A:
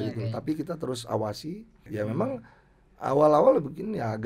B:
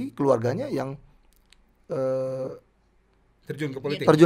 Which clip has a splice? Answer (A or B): A